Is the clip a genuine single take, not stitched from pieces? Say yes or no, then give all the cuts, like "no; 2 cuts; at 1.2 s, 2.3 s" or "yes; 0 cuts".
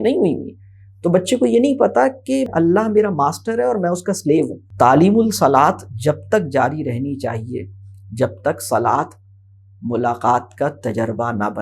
no; 2 cuts; at 2.5 s, 4.6 s